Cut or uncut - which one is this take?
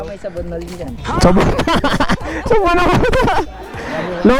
uncut